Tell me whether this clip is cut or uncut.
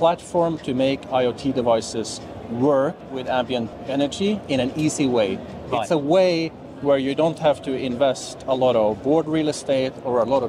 cut